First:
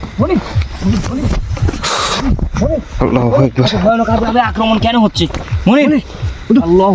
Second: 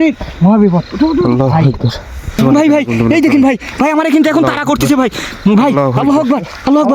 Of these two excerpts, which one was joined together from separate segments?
second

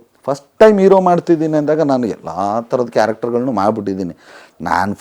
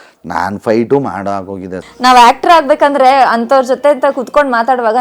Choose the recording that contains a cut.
second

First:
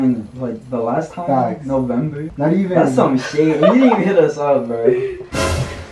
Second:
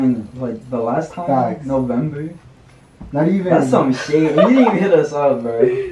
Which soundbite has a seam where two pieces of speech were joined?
first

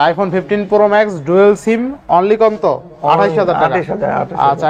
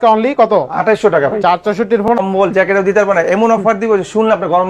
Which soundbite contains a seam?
second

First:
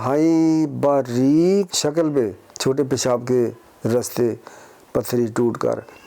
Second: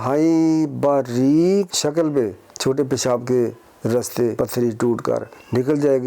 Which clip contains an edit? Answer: second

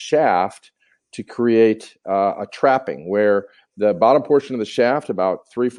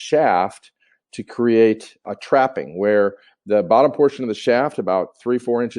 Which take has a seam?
second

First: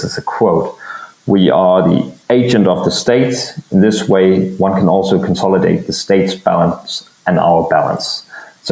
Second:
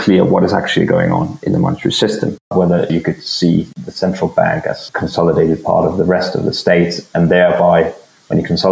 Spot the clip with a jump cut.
second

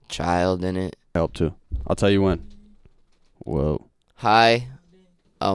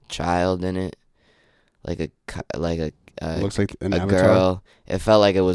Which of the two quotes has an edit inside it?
first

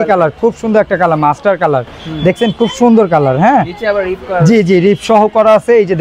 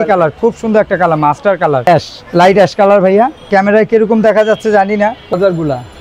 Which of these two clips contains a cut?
second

